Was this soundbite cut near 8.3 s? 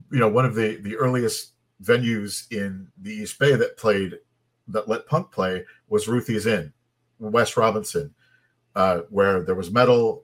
no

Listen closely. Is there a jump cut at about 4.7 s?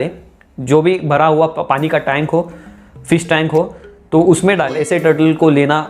yes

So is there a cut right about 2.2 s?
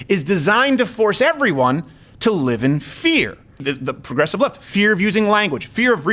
no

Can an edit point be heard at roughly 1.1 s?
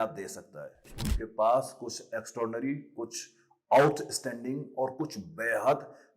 yes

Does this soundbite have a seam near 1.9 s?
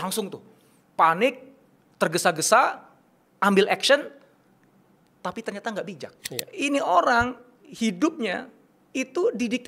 no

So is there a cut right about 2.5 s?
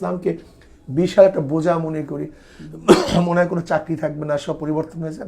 no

